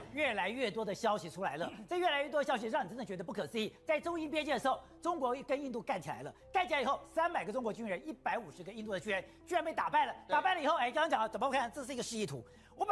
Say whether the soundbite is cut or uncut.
uncut